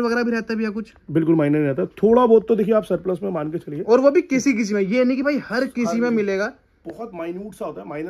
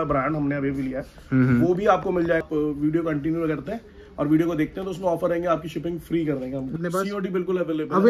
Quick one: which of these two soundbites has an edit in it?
second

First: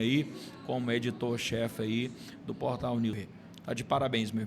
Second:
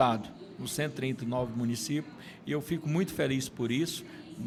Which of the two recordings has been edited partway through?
first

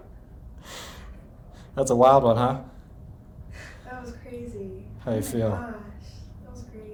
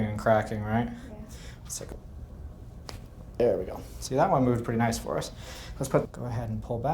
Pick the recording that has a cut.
second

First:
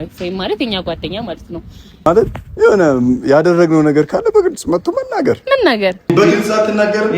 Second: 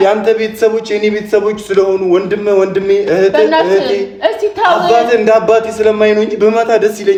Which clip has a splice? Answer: first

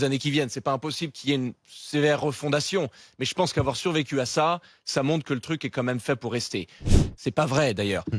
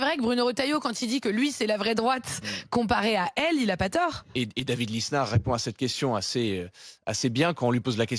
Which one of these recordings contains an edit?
first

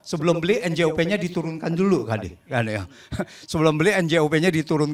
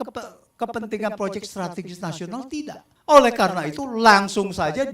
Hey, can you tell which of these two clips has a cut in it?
second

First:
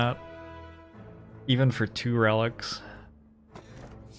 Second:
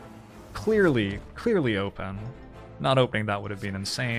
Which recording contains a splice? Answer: first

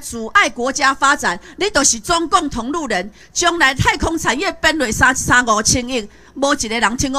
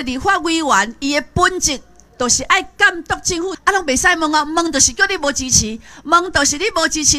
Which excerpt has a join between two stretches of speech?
second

